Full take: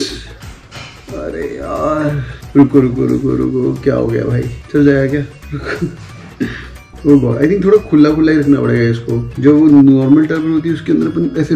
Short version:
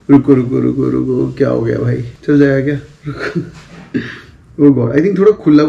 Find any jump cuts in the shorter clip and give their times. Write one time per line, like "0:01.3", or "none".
none

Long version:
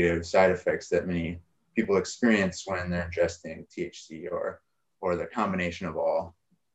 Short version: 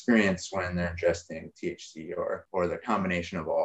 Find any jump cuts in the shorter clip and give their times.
0:02.4

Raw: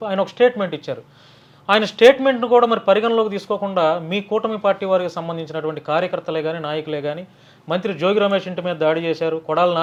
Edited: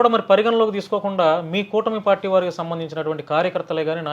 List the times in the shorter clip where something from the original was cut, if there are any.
none

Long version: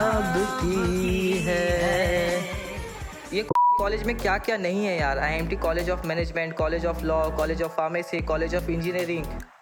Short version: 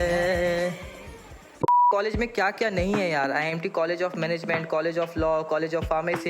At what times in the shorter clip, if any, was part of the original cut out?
0:01.6

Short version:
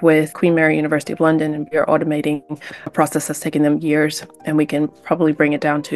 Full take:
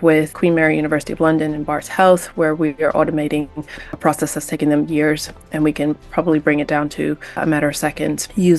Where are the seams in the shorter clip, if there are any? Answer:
0:01.7

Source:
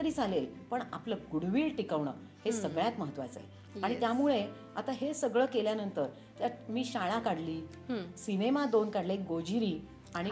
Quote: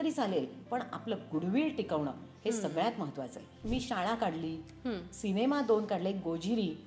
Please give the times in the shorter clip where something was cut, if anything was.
0:03.6

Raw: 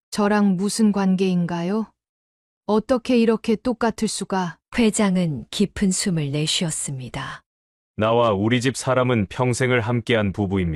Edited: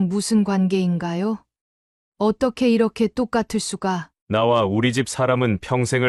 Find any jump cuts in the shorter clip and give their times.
0:04.1

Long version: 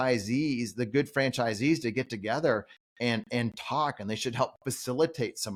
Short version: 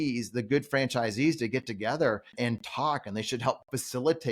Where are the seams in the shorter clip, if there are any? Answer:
0:02.3

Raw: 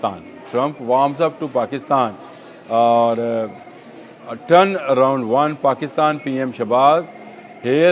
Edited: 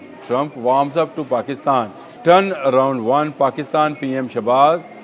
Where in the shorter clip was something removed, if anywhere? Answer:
0:02.0

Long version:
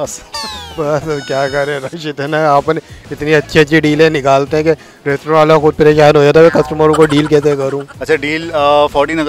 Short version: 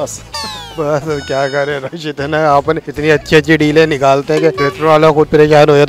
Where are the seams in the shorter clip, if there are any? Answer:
0:02.9
0:04.7

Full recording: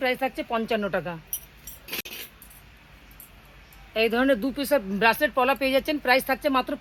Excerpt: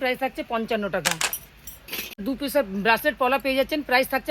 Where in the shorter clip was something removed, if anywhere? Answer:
0:02.2

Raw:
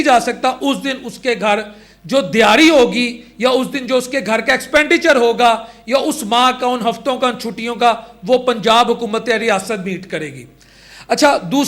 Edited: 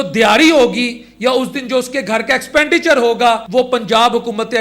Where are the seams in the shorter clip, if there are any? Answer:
0:03.4

